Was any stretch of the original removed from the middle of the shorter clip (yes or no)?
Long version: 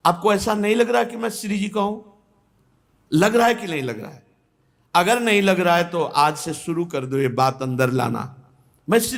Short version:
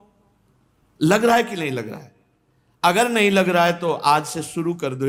no